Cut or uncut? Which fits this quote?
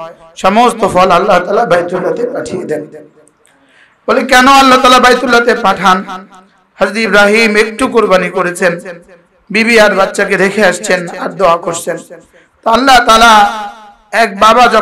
uncut